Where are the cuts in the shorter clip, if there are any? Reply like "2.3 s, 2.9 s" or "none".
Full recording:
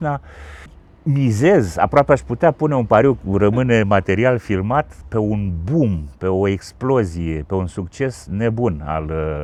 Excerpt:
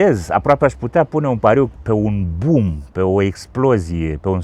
1.8 s